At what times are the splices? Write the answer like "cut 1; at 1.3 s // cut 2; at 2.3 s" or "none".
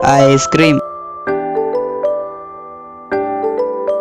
cut 1; at 1.1 s